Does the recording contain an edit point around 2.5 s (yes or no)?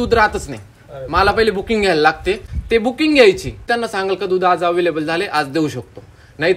yes